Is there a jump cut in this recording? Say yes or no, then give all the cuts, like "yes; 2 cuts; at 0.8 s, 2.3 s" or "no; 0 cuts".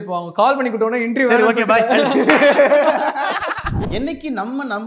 yes; 1 cut; at 3.7 s